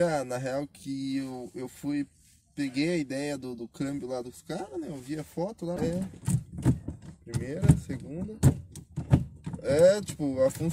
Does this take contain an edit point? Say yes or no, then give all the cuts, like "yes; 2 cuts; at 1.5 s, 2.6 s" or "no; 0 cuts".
yes; 1 cut; at 5.8 s